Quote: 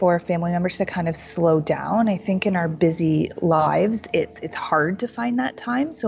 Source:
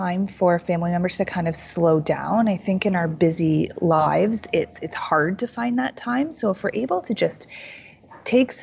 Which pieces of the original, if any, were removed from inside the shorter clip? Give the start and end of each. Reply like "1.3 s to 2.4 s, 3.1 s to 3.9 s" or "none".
none